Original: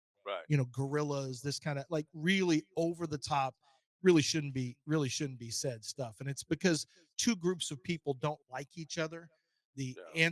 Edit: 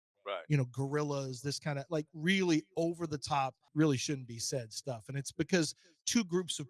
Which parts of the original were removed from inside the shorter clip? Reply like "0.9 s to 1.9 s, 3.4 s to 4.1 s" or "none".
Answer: 3.6 s to 4.8 s